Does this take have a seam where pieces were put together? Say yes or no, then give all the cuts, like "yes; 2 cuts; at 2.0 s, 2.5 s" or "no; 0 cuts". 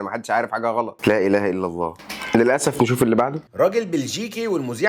yes; 1 cut; at 0.9 s